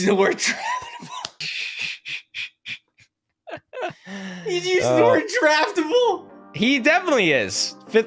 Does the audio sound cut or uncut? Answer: uncut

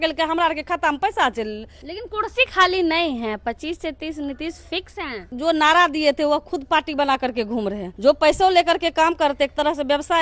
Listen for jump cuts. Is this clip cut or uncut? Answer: cut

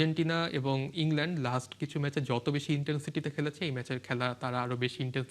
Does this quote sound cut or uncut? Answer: uncut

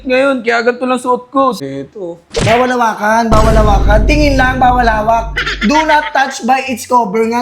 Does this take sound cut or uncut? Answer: cut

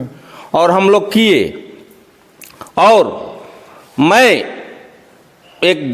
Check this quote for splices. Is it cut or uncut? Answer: uncut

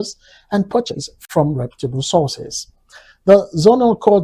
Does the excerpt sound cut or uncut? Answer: cut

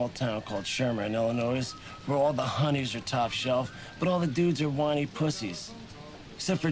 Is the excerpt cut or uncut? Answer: uncut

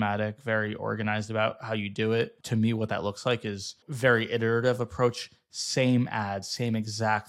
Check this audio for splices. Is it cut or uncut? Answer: cut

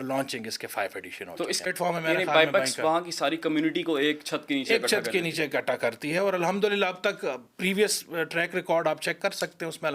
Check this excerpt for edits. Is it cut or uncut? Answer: cut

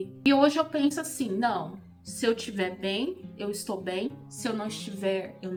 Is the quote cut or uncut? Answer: uncut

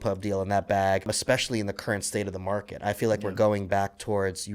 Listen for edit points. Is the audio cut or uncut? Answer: cut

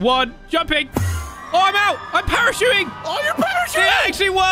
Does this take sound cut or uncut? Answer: uncut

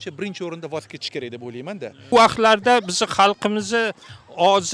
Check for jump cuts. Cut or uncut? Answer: cut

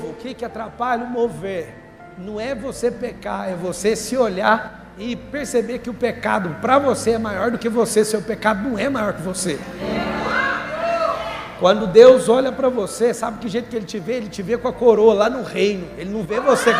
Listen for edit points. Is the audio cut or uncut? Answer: uncut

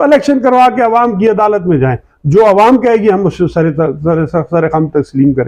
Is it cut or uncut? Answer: uncut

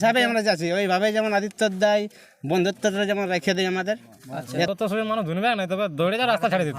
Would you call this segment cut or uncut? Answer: cut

